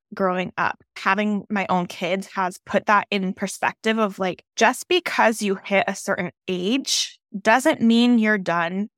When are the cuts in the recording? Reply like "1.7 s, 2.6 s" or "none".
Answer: 1.3 s, 4.4 s